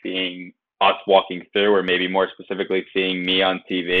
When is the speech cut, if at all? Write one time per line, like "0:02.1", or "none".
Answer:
none